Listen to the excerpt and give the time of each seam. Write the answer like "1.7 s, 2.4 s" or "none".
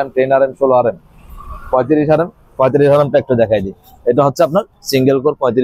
none